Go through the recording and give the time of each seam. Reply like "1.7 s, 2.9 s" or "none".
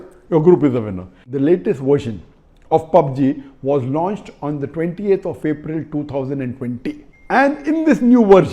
1.3 s, 7.1 s